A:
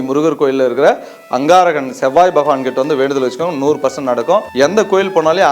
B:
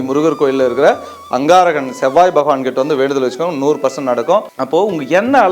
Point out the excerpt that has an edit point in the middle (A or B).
A